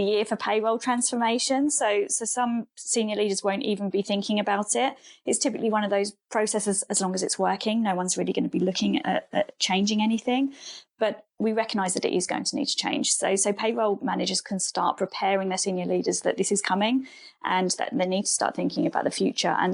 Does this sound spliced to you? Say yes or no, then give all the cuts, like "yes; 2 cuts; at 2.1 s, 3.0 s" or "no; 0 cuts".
yes; 1 cut; at 6.2 s